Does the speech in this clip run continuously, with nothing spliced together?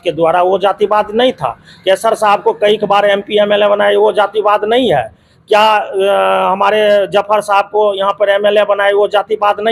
yes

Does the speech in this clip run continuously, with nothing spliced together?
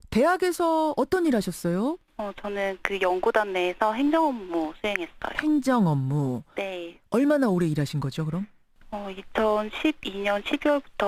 yes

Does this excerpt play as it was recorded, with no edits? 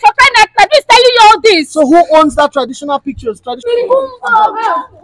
no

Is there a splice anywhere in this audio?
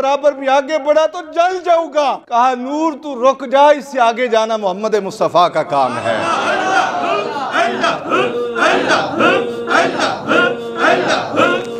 yes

